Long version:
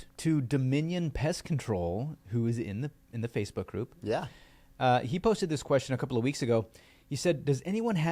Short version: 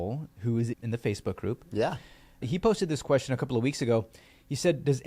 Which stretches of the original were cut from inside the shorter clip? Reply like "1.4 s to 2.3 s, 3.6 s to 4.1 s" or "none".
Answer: 2.7 s to 3.1 s, 4.7 s to 5.0 s